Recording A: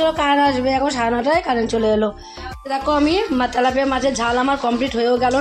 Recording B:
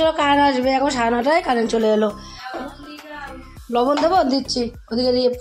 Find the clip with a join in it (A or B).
A